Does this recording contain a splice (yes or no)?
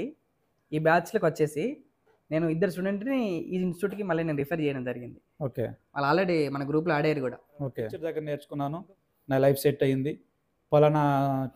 yes